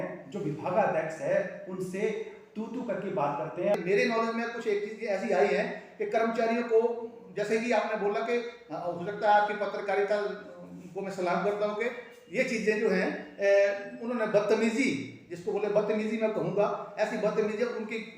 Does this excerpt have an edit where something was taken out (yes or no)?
yes